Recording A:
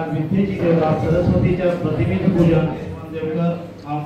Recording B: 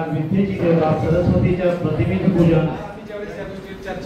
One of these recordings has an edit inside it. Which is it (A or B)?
B